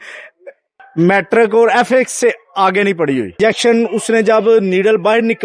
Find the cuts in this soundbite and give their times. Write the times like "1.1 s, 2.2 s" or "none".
3.3 s

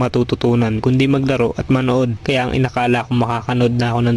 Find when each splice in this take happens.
2.2 s

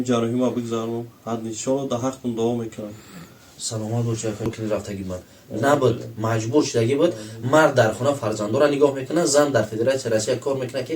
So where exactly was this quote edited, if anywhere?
4.5 s

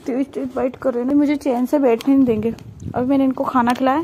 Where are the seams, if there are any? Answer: 1.1 s

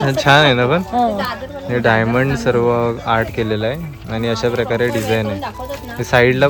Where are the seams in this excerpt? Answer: none

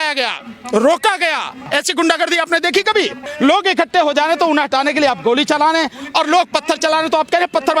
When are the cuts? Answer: 1.6 s, 3.3 s

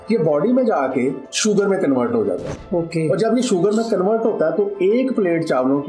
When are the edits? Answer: 1.3 s

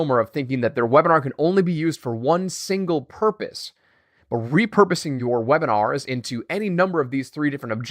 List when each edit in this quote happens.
5.1 s

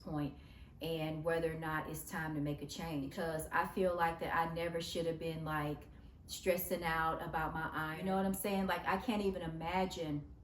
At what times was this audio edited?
3.1 s, 7.9 s

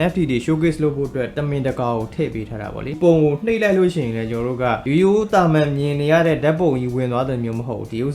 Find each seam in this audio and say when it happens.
3.0 s

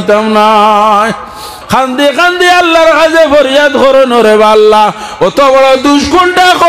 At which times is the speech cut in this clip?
1.5 s

